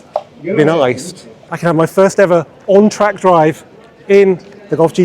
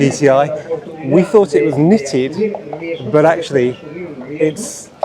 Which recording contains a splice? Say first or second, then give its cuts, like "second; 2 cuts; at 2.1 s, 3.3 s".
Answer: first; 1 cut; at 1.4 s